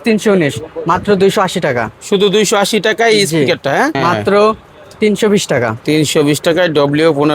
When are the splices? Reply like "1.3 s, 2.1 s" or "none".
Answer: 3.9 s